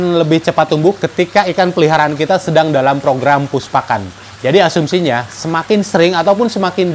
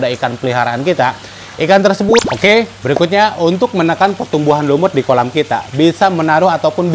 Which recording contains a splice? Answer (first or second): second